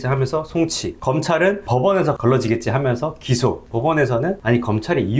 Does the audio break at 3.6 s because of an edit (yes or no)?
yes